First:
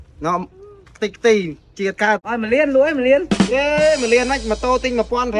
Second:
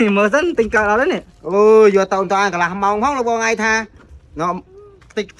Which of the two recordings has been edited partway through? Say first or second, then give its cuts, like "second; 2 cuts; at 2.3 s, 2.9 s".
first; 1 cut; at 2.2 s